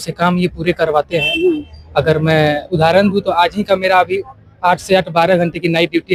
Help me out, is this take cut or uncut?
uncut